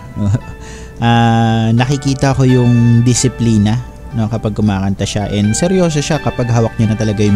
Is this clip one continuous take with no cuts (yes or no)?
yes